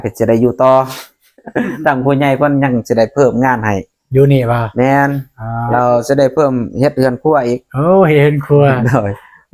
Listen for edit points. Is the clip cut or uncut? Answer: uncut